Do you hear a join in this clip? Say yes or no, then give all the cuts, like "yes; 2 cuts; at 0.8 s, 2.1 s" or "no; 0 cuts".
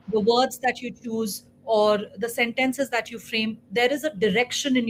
no; 0 cuts